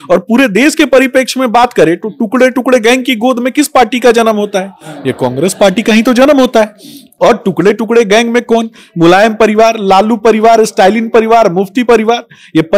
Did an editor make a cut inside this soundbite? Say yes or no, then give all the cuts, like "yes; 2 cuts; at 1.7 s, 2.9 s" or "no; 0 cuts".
no; 0 cuts